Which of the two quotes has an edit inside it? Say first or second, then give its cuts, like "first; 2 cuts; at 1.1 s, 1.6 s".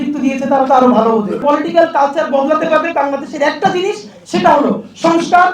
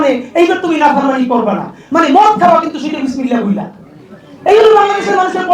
first; 1 cut; at 1.4 s